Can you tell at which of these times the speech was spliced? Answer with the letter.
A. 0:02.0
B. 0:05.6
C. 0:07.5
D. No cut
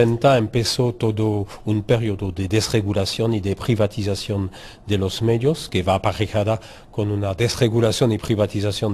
B